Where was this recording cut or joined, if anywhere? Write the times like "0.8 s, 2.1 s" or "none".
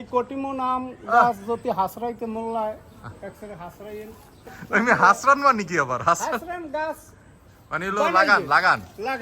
4.6 s